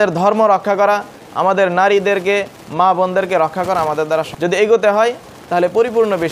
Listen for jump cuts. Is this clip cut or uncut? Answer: cut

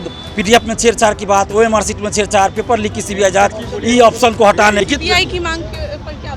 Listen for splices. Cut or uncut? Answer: cut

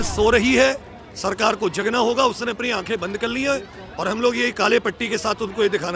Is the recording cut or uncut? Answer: uncut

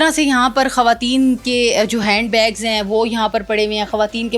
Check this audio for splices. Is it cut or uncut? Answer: uncut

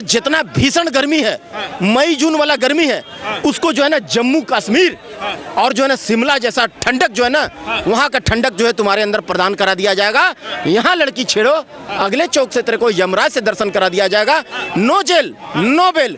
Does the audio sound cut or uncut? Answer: uncut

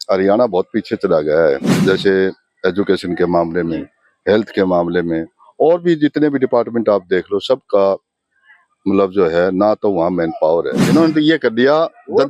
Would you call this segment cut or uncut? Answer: cut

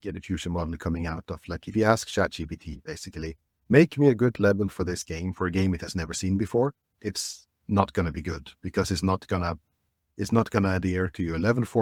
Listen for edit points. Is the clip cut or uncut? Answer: uncut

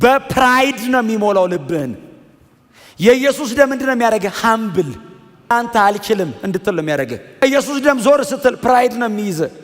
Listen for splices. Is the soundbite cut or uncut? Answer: cut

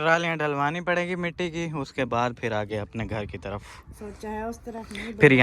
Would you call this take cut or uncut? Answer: cut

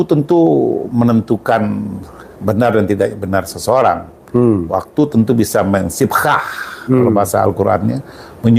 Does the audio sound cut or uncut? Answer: uncut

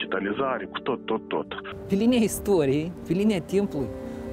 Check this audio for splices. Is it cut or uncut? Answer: cut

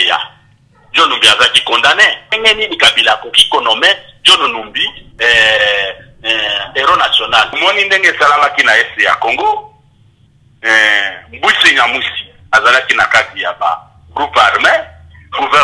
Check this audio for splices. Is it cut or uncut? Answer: cut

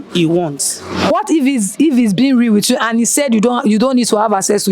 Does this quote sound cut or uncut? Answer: cut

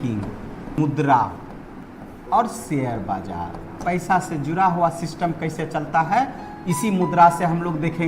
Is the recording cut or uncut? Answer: cut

